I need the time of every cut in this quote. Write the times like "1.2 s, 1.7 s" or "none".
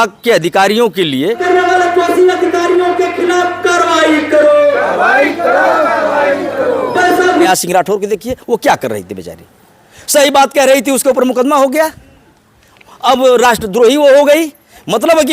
1.4 s, 7.5 s